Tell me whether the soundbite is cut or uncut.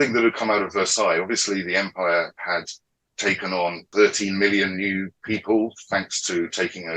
cut